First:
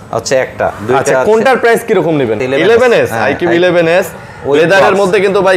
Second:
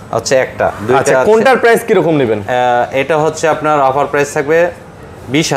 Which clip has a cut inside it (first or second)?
first